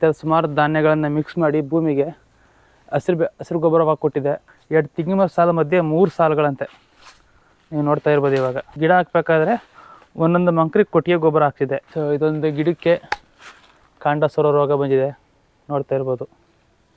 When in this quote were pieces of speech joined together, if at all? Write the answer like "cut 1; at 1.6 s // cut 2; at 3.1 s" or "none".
cut 1; at 4.5 s // cut 2; at 8.7 s // cut 3; at 11.8 s

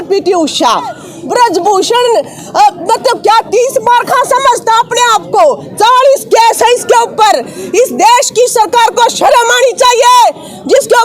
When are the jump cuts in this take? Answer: cut 1; at 1.1 s

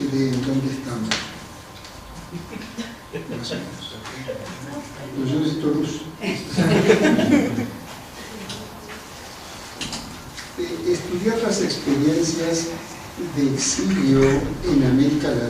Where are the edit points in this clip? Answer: cut 1; at 5.5 s

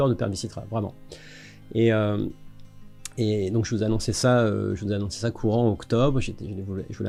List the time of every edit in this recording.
none

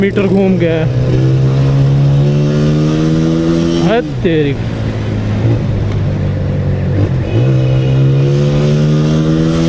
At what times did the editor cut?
none

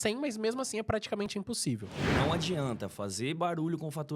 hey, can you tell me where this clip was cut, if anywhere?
cut 1; at 2.0 s

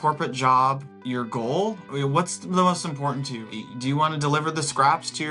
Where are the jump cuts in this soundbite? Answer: cut 1; at 0.9 s // cut 2; at 1.9 s // cut 3; at 3.4 s

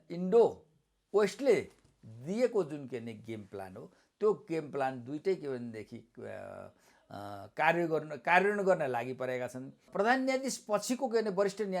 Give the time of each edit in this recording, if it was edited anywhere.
cut 1; at 9.9 s

